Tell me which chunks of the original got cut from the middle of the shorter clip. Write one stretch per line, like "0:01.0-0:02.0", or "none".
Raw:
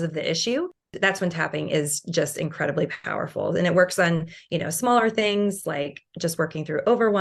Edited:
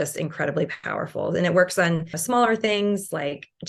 0:04.4-0:04.7